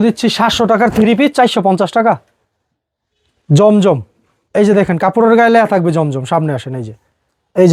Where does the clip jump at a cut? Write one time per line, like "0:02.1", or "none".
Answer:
none